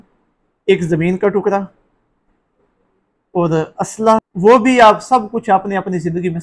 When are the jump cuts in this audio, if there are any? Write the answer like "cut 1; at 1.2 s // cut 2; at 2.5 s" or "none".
cut 1; at 4.3 s